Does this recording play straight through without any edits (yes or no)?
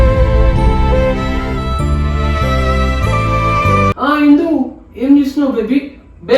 no